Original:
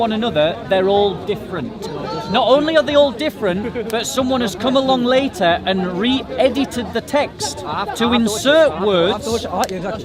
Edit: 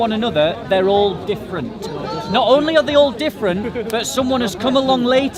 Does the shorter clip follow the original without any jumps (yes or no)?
yes